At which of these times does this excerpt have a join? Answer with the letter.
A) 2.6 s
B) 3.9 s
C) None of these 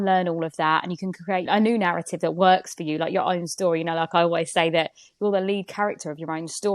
C